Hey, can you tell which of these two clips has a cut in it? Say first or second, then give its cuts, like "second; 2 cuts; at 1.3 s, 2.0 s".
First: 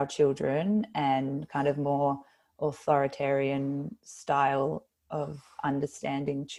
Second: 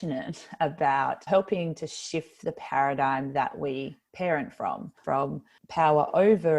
second; 2 cuts; at 1.3 s, 5.0 s